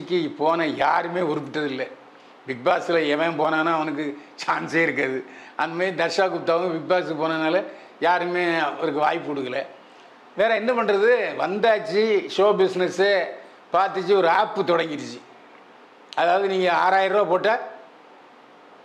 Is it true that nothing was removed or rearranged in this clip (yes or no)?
yes